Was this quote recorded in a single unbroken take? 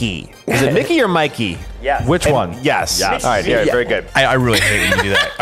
no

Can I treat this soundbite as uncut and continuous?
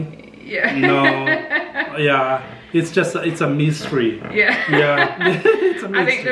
yes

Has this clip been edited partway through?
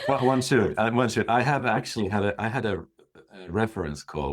no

